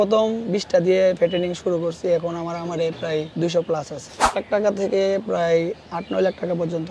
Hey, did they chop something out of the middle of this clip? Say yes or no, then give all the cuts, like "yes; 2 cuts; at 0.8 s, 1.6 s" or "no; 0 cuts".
yes; 2 cuts; at 3.3 s, 4.3 s